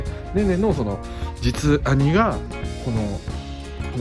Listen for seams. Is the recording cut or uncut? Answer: uncut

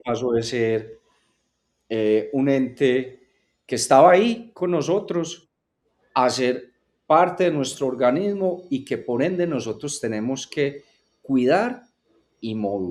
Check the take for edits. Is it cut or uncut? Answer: uncut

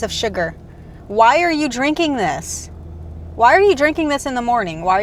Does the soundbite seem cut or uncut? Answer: uncut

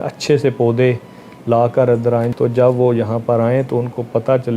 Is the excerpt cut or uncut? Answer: cut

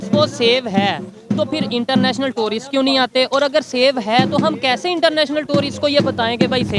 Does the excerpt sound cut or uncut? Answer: uncut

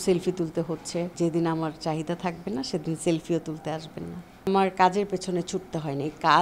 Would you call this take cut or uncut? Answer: cut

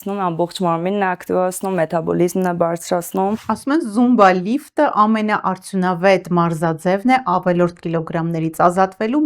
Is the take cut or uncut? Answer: cut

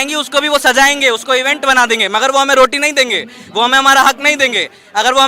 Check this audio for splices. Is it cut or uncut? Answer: uncut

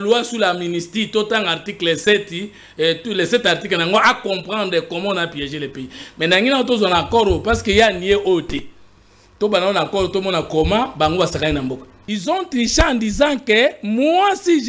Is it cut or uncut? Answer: cut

